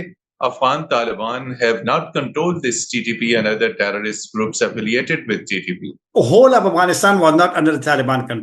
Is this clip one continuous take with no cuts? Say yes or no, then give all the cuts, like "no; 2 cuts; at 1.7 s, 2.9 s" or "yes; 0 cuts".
no; 1 cut; at 5.9 s